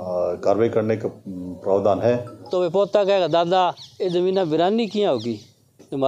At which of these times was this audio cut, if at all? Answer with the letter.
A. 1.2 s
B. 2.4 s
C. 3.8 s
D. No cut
B